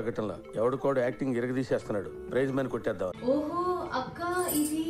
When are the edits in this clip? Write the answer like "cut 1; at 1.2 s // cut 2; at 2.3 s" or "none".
cut 1; at 3.2 s